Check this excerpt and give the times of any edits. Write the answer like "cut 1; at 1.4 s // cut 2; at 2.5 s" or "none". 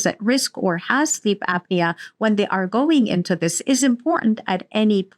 none